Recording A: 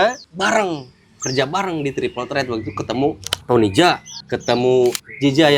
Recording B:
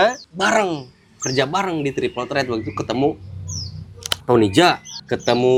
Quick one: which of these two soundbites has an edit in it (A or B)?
A